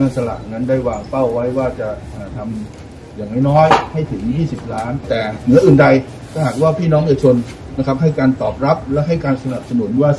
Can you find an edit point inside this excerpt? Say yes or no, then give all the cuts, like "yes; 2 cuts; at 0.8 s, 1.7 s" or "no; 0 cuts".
yes; 1 cut; at 5.1 s